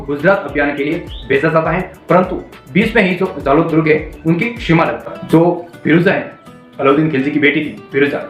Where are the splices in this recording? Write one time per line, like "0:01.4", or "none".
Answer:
0:05.1